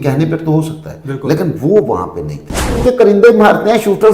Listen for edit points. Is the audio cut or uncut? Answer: cut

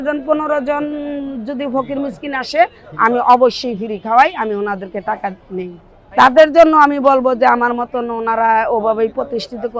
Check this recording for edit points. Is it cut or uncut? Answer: uncut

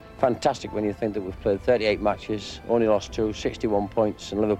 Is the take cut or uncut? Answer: uncut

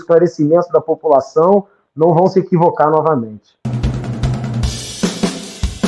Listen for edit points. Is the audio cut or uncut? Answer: cut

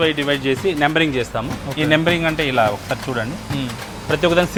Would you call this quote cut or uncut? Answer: uncut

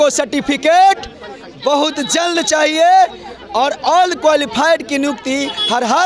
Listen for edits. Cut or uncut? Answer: uncut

